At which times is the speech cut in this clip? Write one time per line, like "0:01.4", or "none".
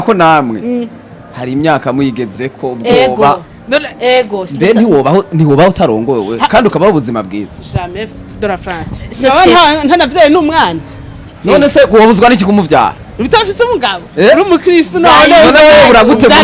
none